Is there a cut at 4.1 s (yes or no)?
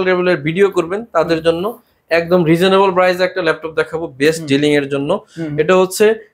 no